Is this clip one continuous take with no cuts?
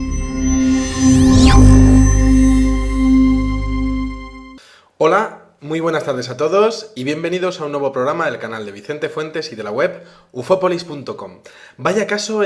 no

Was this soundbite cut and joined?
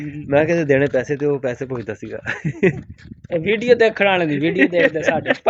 no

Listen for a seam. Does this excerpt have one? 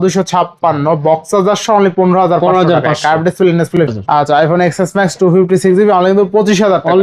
yes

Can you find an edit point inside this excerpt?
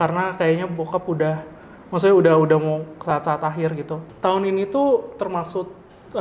yes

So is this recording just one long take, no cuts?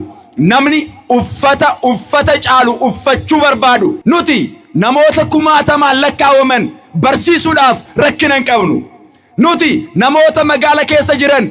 no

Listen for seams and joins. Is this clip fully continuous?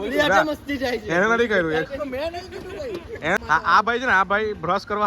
no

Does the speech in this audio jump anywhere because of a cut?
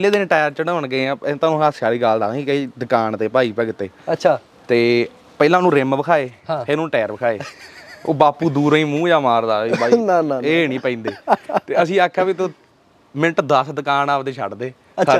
no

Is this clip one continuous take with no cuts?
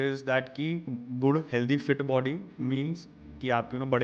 no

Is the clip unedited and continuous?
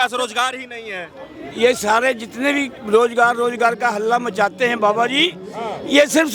yes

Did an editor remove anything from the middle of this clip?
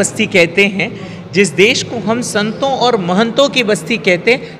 no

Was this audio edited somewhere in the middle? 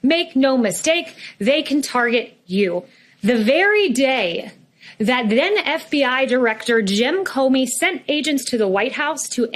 yes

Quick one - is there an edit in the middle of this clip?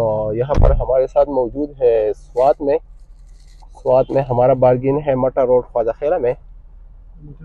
no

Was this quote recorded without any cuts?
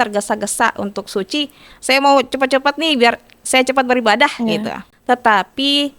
no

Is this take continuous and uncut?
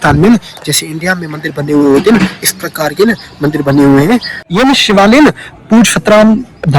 no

